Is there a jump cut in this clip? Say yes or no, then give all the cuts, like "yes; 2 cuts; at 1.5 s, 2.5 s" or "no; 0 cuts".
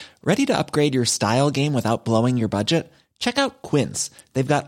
no; 0 cuts